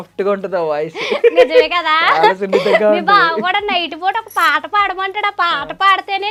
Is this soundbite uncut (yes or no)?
yes